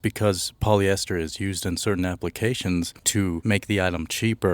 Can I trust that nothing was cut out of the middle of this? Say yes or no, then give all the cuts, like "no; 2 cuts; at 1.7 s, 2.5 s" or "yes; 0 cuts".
no; 1 cut; at 3.4 s